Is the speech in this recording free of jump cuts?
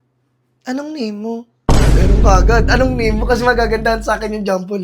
yes; 0 cuts

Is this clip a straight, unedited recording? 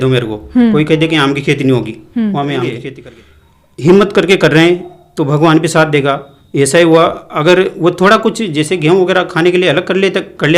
no; 1 cut; at 2.9 s

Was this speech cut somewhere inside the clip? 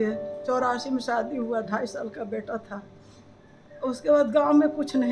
no; 0 cuts

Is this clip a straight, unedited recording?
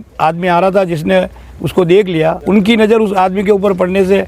no; 1 cut; at 2.4 s

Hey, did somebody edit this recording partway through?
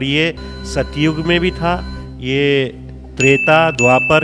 no; 0 cuts

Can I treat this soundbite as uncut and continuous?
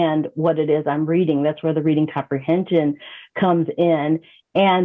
yes; 0 cuts

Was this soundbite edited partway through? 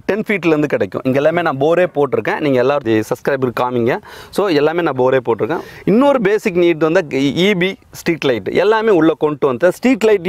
no; 0 cuts

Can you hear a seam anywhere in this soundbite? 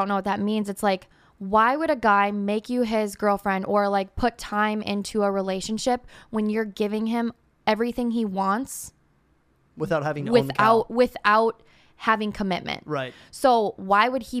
no; 0 cuts

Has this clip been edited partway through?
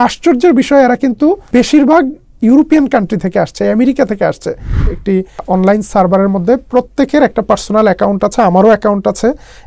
yes; 2 cuts; at 1.4 s, 4.9 s

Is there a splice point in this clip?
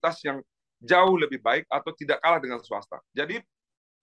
yes; 1 cut; at 3.0 s

